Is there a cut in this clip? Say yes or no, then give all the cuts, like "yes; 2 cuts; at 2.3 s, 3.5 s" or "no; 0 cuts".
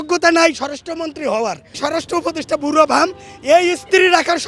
yes; 1 cut; at 1.8 s